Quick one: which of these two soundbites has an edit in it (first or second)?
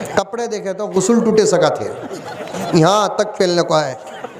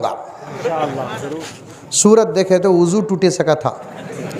second